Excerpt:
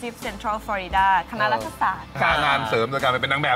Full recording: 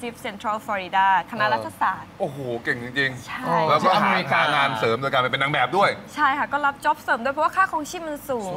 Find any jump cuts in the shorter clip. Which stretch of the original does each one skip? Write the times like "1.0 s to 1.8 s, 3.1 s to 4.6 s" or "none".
2.1 s to 4.2 s